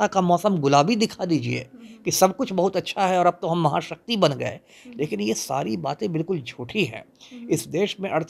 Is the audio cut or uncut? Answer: uncut